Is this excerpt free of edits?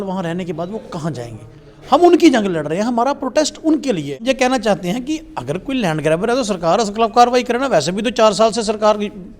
no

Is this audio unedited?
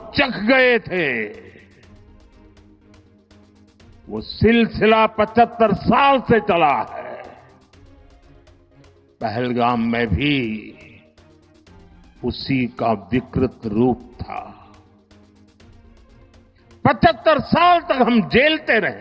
no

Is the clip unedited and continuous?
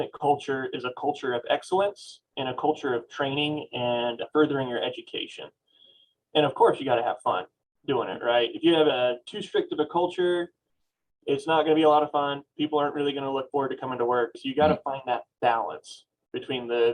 yes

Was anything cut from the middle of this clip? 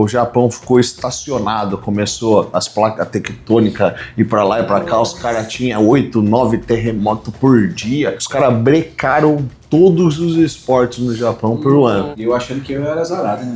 yes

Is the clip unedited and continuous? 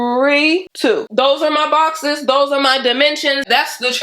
no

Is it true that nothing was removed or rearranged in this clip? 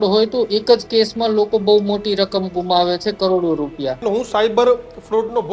no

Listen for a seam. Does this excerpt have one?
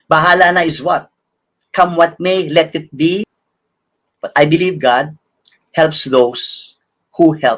yes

